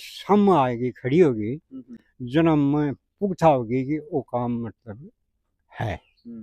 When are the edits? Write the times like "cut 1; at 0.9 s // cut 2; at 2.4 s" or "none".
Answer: none